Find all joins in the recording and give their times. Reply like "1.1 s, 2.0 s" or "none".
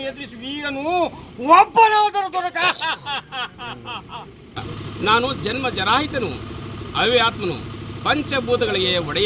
4.7 s